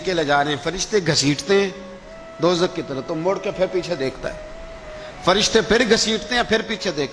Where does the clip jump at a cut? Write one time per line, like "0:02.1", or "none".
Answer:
none